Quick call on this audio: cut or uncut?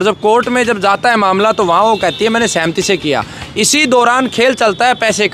uncut